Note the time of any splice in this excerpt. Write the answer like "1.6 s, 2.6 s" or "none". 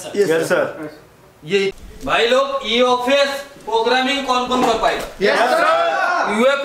1.7 s